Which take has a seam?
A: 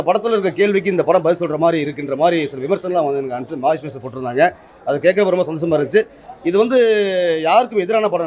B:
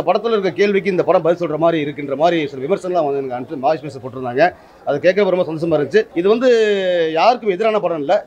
B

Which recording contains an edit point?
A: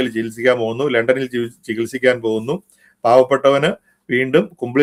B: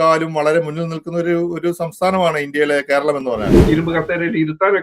B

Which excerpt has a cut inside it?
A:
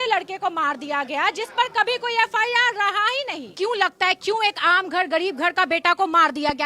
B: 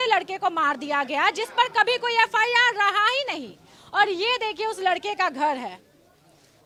A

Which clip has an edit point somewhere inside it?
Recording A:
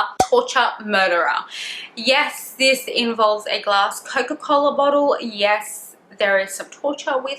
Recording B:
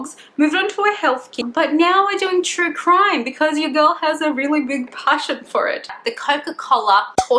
B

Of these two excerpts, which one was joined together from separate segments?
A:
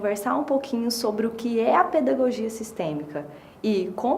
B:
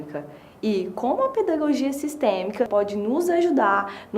B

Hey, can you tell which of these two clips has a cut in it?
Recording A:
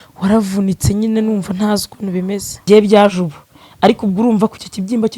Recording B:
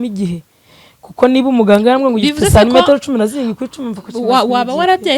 A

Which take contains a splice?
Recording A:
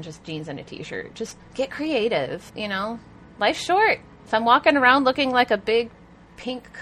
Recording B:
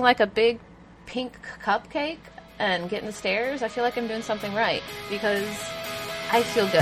A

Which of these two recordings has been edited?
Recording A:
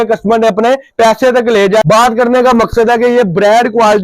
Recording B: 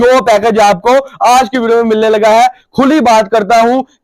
A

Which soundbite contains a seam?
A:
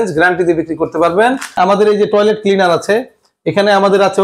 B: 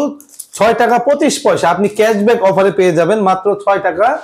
A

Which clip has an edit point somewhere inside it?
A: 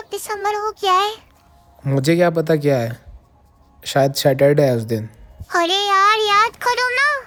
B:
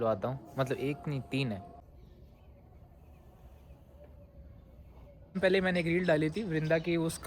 B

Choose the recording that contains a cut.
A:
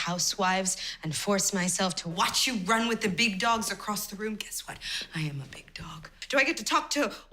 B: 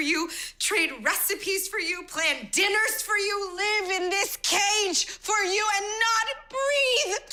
A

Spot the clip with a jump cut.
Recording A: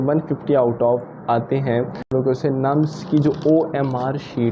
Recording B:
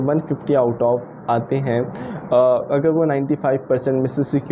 A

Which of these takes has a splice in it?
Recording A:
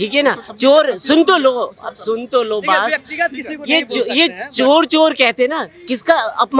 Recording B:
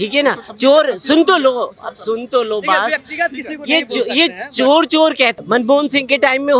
B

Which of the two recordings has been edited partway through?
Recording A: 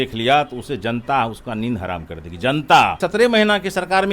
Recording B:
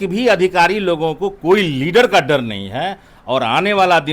A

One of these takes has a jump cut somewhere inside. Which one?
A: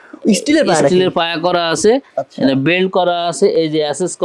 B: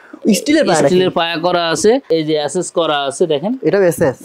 B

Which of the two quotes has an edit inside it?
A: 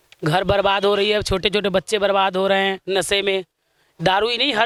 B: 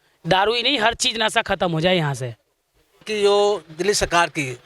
B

